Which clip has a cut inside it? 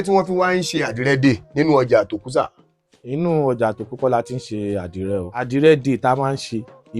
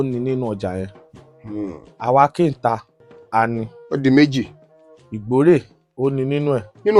first; 1 cut; at 5.4 s

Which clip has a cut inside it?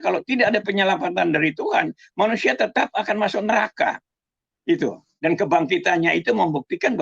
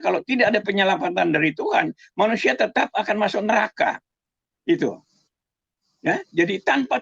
first; 1 cut; at 5.1 s

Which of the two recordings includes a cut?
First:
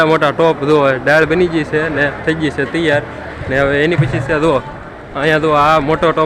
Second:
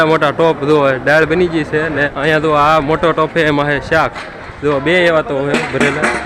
second; 2 cuts; at 2.1 s, 4.4 s

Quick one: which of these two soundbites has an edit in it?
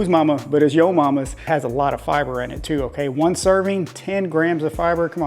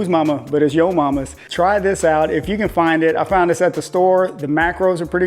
first; 1 cut; at 1.4 s

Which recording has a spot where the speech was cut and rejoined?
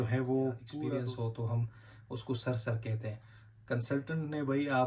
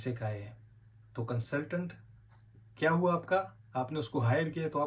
first; 1 cut; at 0.9 s

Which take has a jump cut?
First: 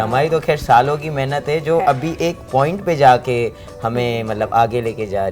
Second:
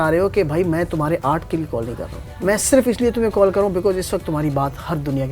second; 1 cut; at 2.2 s

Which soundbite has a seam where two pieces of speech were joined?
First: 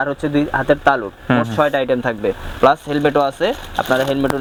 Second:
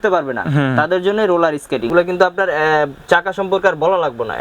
second; 1 cut; at 1.9 s

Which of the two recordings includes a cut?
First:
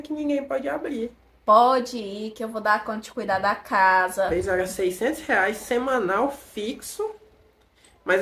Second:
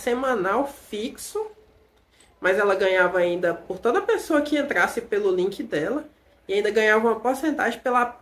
first; 2 cuts; at 1.2 s, 4.4 s

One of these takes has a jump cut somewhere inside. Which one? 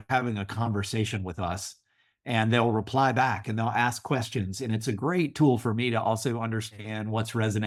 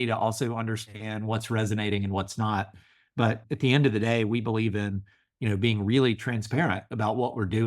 second; 1 cut; at 3.4 s

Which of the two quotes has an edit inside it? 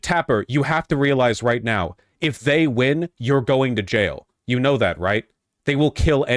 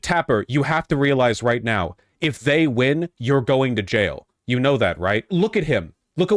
second; 1 cut; at 5.3 s

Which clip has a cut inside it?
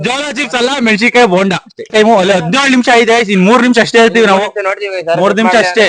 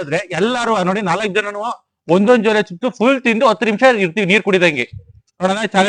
first; 1 cut; at 1.9 s

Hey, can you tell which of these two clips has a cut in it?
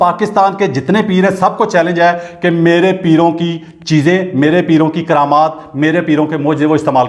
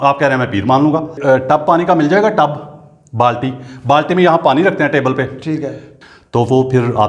second; 2 cuts; at 1.2 s, 5.8 s

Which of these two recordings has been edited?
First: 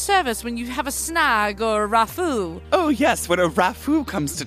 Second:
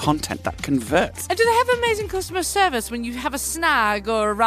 second; 1 cut; at 1.2 s

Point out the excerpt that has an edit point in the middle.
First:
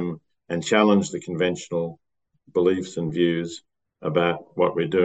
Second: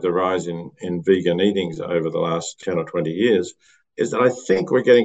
second; 1 cut; at 2.5 s

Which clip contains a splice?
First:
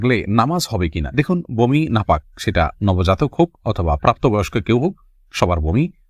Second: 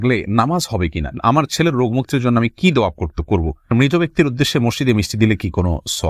second; 2 cuts; at 1.1 s, 3.7 s

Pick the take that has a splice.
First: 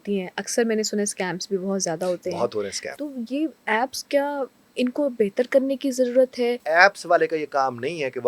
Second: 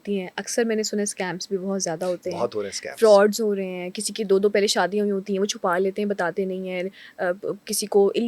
first; 2 cuts; at 2.8 s, 6.6 s

